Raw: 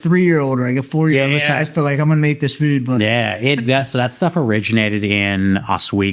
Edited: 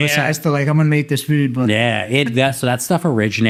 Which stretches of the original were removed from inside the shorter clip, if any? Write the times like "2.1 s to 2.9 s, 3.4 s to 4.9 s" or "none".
none